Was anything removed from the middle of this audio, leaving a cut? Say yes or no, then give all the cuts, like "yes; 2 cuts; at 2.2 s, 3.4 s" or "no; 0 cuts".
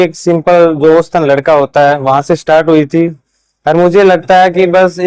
no; 0 cuts